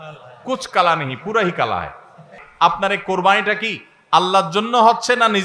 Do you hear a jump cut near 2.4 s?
yes; 1 cut; at 2.4 s

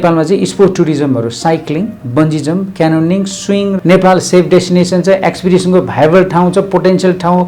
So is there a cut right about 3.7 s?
yes; 1 cut; at 3.7 s

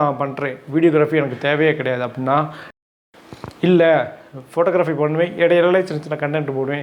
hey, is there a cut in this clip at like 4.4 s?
no; 1 cut; at 2.8 s

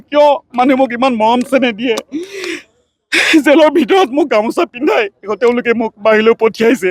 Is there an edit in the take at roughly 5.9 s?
no; 0 cuts

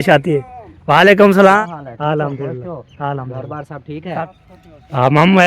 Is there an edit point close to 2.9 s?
no; 2 cuts; at 1.6 s, 4.2 s

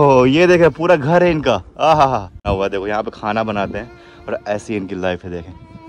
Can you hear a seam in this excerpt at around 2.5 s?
yes; 1 cut; at 2.5 s

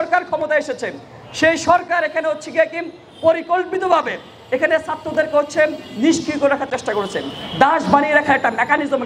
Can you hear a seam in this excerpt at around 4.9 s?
no; 0 cuts

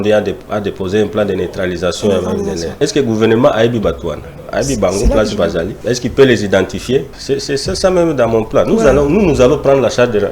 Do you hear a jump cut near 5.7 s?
yes; 3 cuts; at 2.7 s, 5.7 s, 7.2 s

